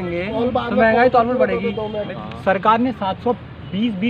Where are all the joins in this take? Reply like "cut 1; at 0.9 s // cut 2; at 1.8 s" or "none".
cut 1; at 2.1 s